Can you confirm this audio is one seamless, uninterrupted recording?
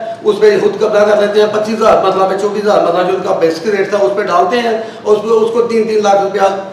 yes; 0 cuts

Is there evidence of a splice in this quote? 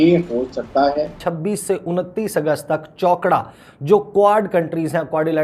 yes; 1 cut; at 1.2 s

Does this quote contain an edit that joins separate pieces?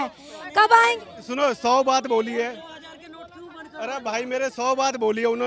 no; 0 cuts

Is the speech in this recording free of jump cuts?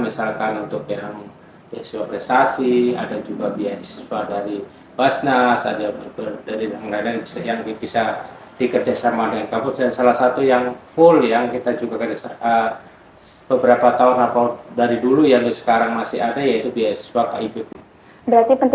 no; 1 cut; at 17.7 s

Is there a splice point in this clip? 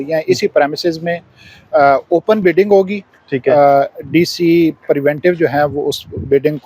no; 0 cuts

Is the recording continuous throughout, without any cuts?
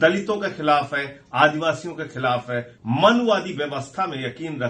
no; 1 cut; at 2.7 s

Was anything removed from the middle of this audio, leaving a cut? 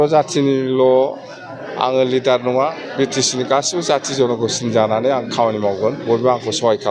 no; 0 cuts

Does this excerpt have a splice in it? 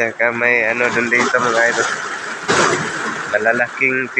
yes; 1 cut; at 2.5 s

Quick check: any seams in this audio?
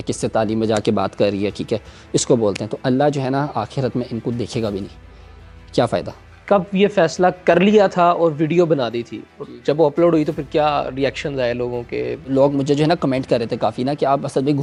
no; 0 cuts

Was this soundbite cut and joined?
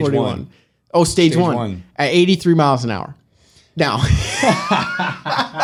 no; 0 cuts

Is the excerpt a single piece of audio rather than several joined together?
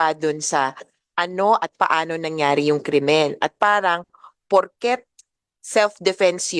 yes; 0 cuts

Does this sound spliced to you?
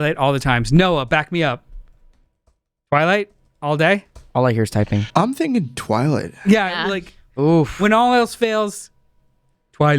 yes; 1 cut; at 5.1 s

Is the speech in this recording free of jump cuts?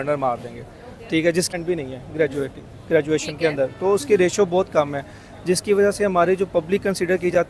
no; 1 cut; at 1.5 s

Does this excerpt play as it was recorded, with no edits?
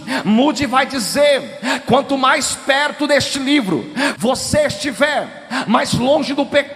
no; 1 cut; at 4.1 s

